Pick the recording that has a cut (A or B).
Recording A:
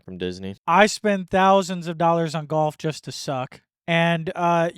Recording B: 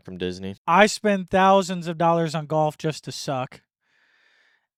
A